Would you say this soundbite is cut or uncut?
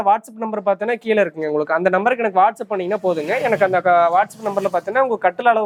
uncut